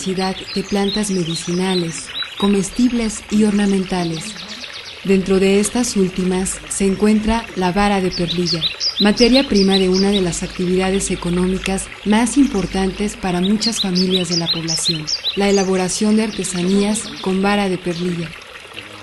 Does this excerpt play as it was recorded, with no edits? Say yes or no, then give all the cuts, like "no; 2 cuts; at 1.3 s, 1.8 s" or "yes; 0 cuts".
yes; 0 cuts